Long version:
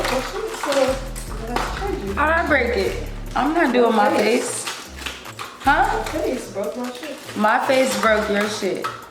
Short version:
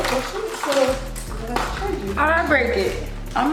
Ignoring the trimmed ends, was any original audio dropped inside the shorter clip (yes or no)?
no